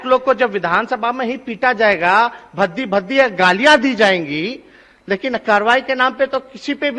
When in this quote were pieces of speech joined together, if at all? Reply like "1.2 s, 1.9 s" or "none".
none